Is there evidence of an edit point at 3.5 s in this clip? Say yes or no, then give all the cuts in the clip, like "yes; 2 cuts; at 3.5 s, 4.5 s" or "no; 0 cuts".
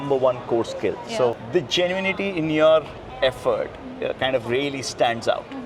no; 1 cut; at 1.4 s